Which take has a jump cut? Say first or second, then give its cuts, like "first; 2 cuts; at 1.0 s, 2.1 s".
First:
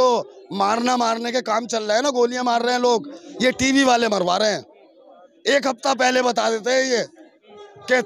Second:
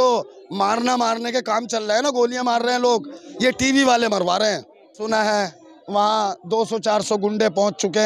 second; 1 cut; at 5.0 s